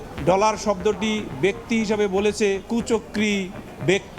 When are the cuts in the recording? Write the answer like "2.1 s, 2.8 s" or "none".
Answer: 2.7 s